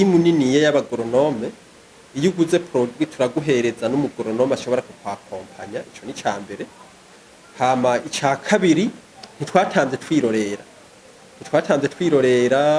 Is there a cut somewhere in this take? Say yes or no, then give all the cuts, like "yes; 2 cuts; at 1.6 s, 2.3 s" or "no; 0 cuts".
no; 0 cuts